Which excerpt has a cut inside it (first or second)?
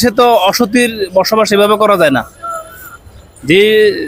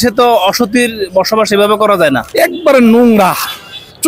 second